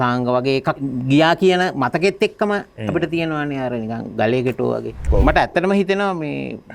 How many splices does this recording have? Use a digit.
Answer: 2